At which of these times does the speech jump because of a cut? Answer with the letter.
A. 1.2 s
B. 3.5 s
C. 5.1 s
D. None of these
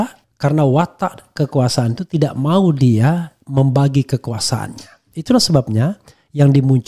C